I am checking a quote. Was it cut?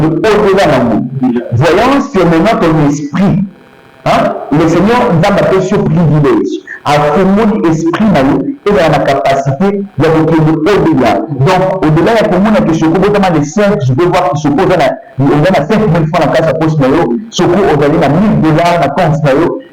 no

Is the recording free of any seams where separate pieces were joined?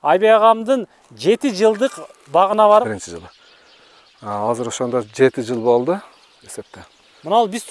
no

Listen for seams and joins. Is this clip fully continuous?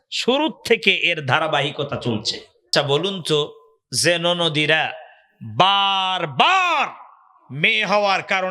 no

